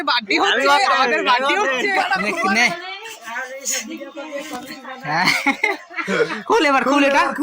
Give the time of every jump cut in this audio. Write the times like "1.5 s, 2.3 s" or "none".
2.2 s